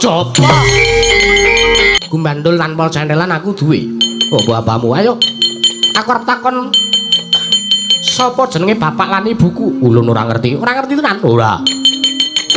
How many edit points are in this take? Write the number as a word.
one